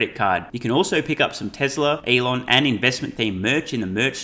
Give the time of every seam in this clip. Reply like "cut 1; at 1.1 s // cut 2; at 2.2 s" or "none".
cut 1; at 2.0 s